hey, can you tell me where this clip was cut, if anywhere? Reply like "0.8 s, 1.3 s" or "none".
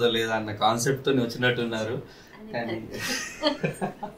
none